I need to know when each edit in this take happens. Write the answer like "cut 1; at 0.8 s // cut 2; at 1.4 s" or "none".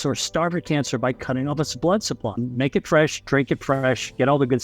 cut 1; at 2.4 s